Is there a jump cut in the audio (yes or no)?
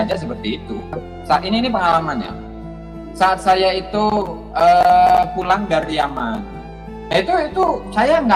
yes